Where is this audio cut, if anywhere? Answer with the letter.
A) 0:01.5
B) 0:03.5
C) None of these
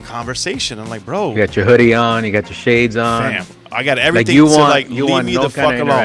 C